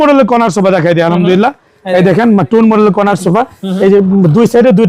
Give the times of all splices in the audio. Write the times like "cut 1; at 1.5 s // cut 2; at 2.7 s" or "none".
none